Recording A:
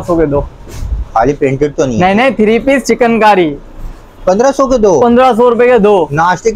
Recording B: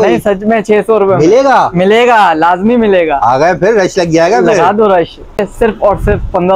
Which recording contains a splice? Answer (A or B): B